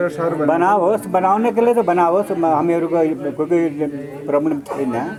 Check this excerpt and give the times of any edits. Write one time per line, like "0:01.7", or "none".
none